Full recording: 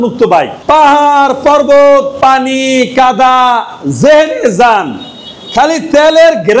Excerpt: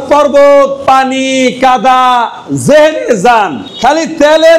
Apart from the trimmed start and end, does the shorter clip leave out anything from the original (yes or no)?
yes